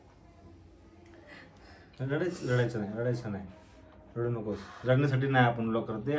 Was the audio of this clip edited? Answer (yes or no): no